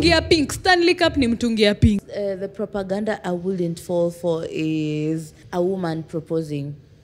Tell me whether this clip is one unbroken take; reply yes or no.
no